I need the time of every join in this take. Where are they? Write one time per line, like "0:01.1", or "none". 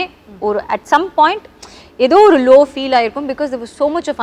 none